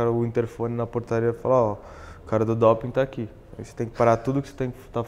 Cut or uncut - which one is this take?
uncut